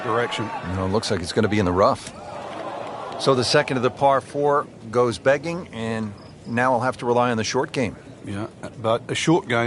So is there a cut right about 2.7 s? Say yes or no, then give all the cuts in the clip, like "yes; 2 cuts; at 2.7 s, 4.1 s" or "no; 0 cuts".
yes; 1 cut; at 2.7 s